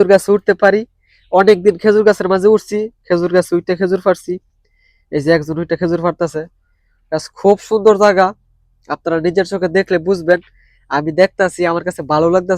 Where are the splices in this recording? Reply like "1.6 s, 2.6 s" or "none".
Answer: none